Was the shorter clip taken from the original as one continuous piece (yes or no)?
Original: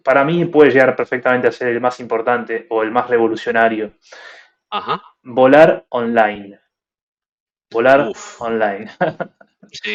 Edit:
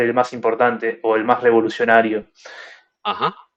yes